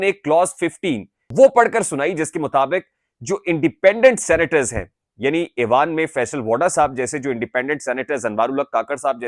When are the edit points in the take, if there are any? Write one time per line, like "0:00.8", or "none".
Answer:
0:01.1